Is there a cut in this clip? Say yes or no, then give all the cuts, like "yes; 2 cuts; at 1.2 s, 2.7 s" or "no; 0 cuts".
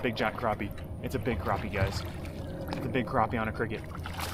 no; 0 cuts